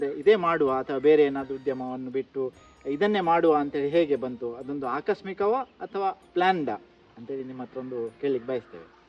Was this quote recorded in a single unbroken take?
yes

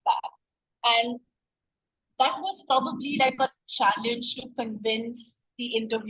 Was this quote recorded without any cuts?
yes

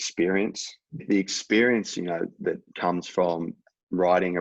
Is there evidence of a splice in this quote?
yes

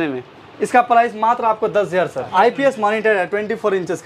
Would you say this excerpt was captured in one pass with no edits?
no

